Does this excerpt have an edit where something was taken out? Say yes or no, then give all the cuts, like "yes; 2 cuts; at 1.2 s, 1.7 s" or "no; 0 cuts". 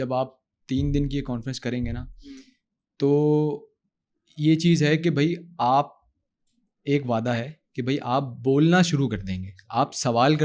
no; 0 cuts